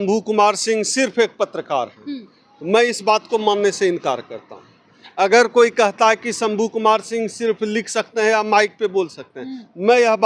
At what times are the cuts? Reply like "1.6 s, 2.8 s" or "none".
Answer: none